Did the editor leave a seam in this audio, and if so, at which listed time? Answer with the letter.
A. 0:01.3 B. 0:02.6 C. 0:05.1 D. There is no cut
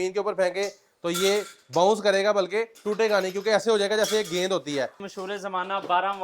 C